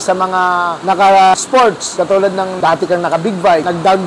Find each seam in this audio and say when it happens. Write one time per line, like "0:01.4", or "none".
none